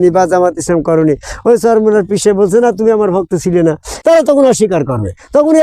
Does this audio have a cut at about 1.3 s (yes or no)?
no